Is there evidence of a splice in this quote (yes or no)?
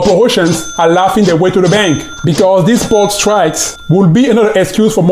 yes